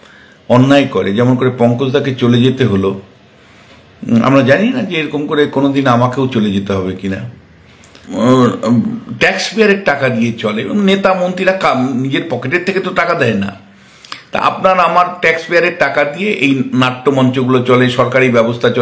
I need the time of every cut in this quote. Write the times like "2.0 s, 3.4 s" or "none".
8.0 s